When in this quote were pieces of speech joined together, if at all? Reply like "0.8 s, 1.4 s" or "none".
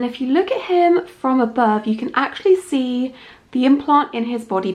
none